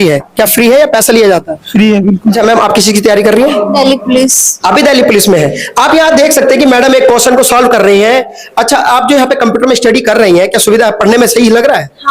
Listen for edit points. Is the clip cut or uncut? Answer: cut